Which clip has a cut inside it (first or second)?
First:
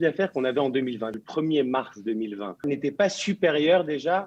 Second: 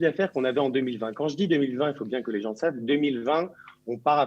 first